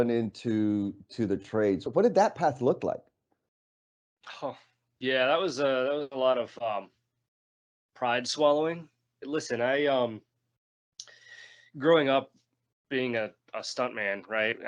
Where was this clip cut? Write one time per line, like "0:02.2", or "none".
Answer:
0:01.9
0:09.2